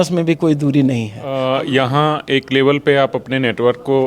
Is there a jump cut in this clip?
yes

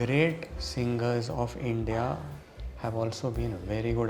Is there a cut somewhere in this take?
no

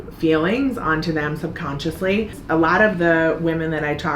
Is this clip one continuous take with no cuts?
no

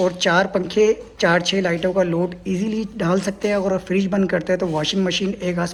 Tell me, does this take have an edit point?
no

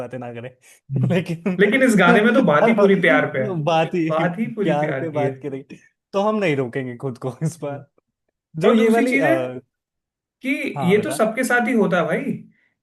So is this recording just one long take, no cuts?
yes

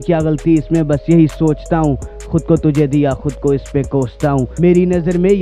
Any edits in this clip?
yes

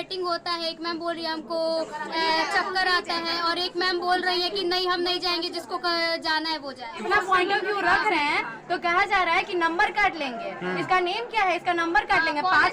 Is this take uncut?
no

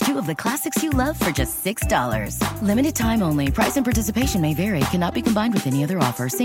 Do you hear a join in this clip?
no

